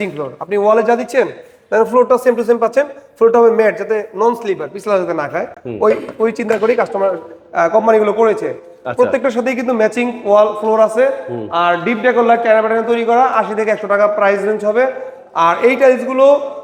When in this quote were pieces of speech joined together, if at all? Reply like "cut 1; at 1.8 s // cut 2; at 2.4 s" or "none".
none